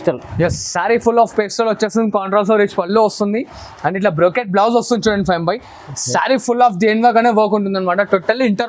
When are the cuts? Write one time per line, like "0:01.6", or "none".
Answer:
none